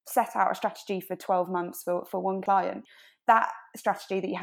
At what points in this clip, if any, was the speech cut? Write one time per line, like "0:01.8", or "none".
0:02.6